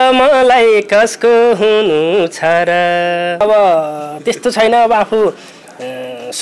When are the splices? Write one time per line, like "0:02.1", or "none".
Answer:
0:03.4